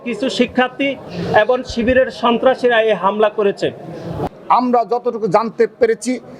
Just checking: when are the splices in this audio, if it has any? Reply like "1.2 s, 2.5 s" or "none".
4.2 s